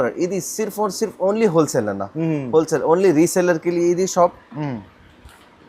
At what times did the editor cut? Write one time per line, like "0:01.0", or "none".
none